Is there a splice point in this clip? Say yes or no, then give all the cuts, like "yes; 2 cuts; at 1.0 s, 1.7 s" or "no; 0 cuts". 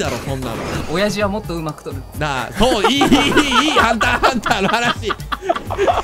no; 0 cuts